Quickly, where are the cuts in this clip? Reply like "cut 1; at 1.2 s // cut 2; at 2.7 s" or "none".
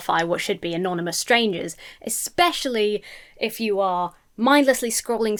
none